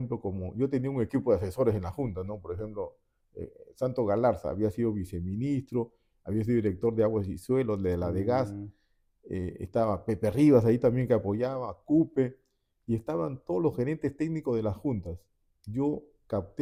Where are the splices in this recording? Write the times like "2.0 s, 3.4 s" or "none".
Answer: none